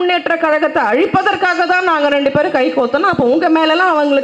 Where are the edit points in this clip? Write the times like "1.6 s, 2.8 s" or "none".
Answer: none